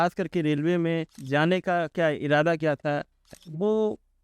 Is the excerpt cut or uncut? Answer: cut